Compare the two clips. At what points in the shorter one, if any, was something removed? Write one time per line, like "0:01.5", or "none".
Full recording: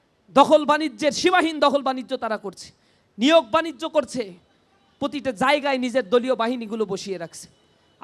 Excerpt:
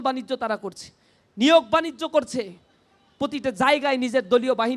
none